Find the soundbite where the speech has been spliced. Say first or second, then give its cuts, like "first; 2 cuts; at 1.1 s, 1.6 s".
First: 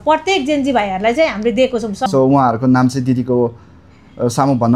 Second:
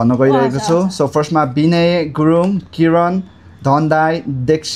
first; 1 cut; at 2.0 s